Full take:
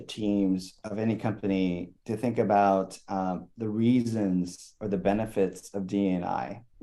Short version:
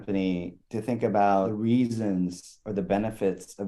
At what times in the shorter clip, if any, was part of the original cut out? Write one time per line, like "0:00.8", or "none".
0:01.5